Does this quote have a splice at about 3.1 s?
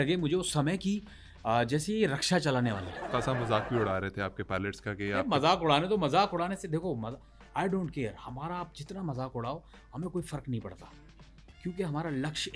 yes; 1 cut; at 3.1 s

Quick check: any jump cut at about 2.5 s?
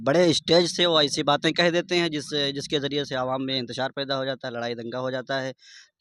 no; 0 cuts

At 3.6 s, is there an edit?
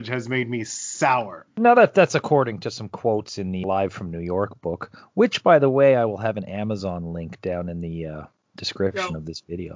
yes; 2 cuts; at 1.4 s, 3.6 s

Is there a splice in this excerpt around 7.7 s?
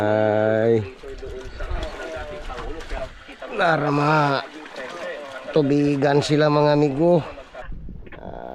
yes; 1 cut; at 7.7 s

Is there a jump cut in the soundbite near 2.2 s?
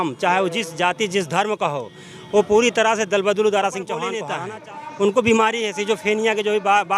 no; 1 cut; at 4.2 s

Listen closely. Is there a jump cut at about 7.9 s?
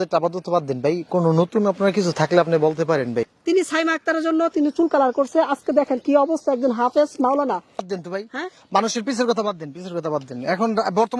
yes; 2 cuts; at 3.3 s, 7.9 s

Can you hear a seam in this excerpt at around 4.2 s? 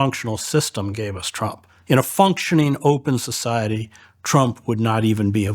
no; 1 cut; at 1.7 s

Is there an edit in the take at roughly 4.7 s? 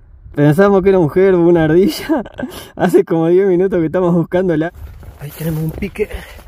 yes; 1 cut; at 4.7 s

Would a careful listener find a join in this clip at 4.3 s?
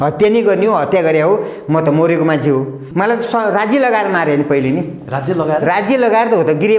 no; 1 cut; at 2.8 s

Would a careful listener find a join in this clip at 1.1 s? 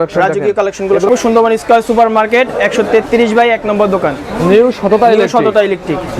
yes; 1 cut; at 1.1 s

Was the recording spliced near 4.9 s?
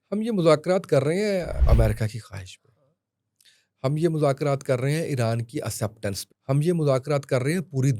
no; 2 cuts; at 1.6 s, 6.3 s

